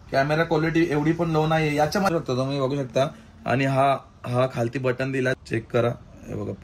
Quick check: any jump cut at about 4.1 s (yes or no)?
no